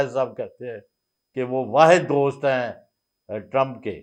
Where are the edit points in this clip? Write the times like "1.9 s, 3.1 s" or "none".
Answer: none